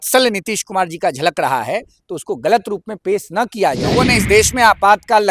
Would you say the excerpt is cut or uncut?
cut